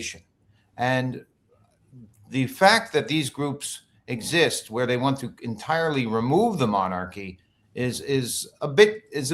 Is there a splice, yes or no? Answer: no